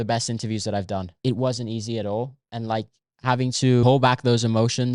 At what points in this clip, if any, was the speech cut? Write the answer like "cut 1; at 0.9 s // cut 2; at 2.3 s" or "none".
cut 1; at 1.1 s // cut 2; at 3.8 s